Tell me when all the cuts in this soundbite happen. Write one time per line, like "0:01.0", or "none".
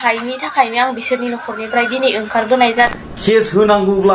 0:03.1